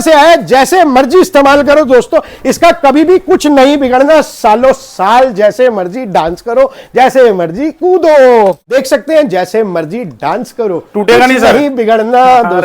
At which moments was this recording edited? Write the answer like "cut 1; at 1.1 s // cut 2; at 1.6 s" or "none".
cut 1; at 8.7 s